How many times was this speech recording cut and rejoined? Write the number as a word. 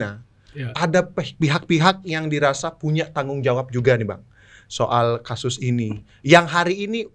zero